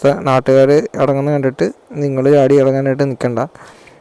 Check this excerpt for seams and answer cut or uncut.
uncut